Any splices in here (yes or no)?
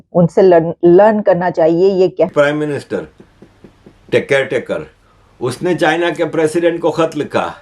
yes